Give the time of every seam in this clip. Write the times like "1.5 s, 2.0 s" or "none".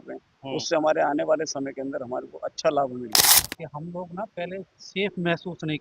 3.3 s